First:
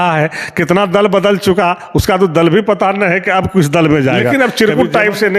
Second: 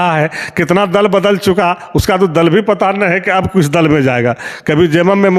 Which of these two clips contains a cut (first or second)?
first